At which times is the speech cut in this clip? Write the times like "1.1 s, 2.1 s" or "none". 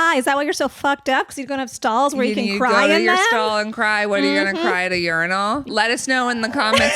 5.7 s